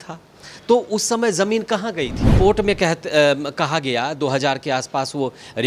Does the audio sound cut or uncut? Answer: cut